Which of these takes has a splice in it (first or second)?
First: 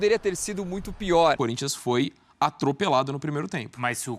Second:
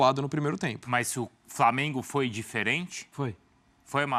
first